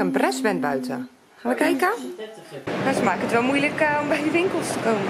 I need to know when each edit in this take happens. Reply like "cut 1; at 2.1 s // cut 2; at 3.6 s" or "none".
cut 1; at 2.7 s

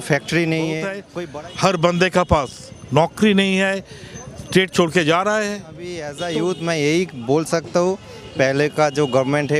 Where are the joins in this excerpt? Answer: cut 1; at 1.0 s // cut 2; at 6.1 s

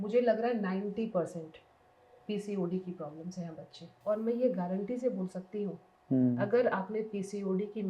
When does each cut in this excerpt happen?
cut 1; at 3.9 s

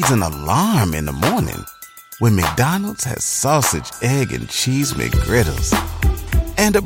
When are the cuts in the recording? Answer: none

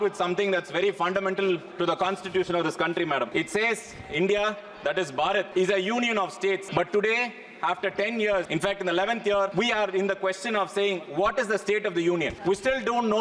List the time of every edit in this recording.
cut 1; at 3.3 s // cut 2; at 5.5 s // cut 3; at 6.7 s // cut 4; at 8.5 s // cut 5; at 9.5 s // cut 6; at 12.3 s

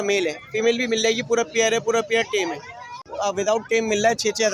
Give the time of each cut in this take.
cut 1; at 3.1 s

